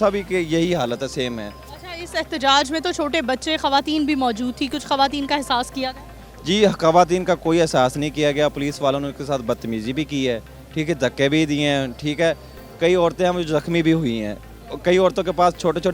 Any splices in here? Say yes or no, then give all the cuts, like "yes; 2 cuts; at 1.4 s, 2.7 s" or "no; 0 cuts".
no; 0 cuts